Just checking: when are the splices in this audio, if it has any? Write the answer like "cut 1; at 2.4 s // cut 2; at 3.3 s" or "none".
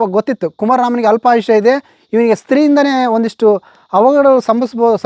none